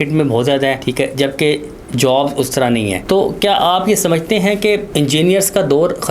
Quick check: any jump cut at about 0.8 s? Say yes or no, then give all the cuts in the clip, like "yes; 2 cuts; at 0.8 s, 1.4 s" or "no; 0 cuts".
yes; 3 cuts; at 0.8 s, 3.0 s, 4.9 s